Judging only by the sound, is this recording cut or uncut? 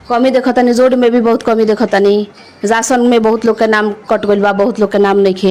uncut